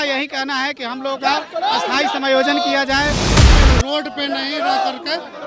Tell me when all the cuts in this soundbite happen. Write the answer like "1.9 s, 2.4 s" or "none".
3.4 s